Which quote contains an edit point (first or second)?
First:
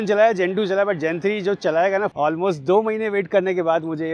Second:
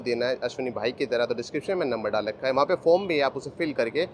first